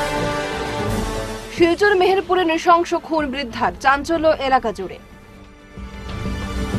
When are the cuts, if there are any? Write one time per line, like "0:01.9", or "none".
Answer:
0:01.0